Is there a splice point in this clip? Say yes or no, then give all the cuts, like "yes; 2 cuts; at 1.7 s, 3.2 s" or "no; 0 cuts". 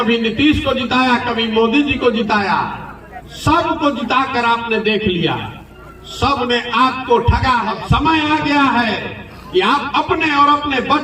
yes; 1 cut; at 7.7 s